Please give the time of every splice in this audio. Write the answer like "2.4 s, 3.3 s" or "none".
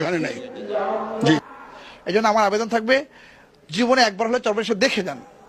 1.5 s